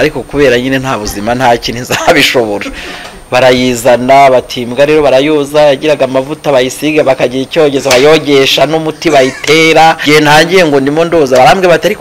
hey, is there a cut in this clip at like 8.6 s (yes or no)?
no